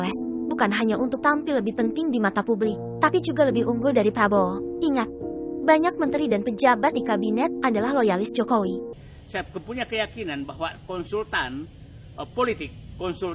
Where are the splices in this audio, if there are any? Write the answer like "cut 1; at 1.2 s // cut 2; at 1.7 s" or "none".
cut 1; at 8.9 s